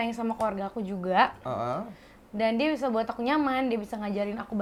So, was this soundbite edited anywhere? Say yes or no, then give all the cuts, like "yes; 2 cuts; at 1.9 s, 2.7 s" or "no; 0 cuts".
no; 0 cuts